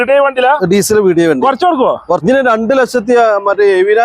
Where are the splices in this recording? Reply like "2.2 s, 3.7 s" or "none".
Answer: 2.2 s

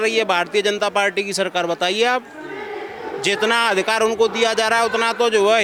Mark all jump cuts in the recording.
none

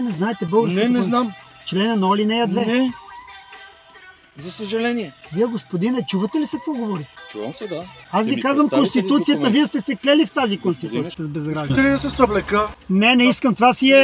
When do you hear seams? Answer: 1.4 s, 3.0 s, 5.2 s, 8.0 s, 11.2 s

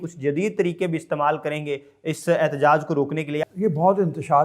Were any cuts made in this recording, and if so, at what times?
3.4 s

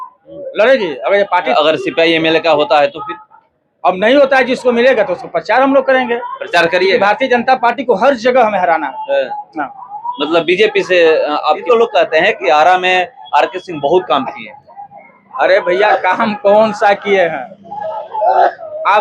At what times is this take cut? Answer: 1.5 s, 11.6 s

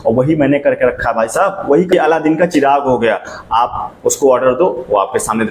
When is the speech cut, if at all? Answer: 1.9 s

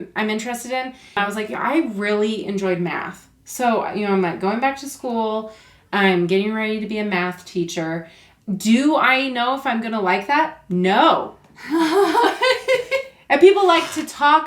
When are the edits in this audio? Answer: 1.2 s

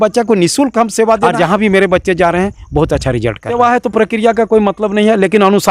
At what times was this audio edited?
1.3 s, 3.7 s

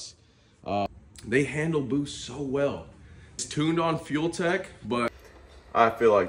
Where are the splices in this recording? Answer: 0.9 s, 3.4 s, 5.3 s

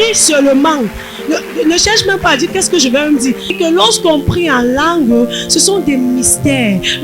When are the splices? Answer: 3.5 s

